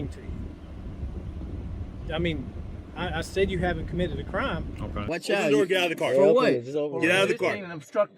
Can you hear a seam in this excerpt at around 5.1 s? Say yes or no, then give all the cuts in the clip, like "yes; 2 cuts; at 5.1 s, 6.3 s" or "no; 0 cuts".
yes; 1 cut; at 5.1 s